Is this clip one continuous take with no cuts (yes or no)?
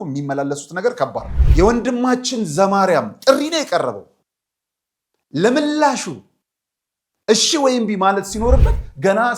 no